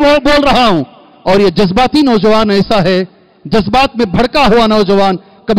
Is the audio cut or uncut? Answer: uncut